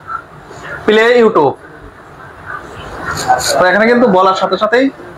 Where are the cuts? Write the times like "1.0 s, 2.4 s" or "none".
none